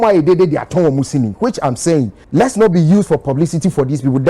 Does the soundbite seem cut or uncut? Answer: cut